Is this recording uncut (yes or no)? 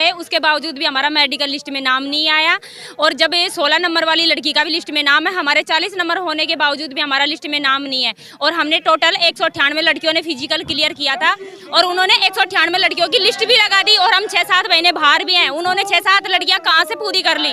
yes